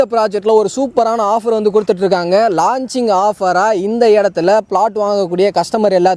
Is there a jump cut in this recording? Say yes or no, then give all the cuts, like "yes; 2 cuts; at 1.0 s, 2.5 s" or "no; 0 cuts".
no; 0 cuts